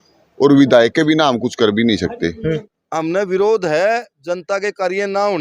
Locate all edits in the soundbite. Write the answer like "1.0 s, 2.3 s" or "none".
2.8 s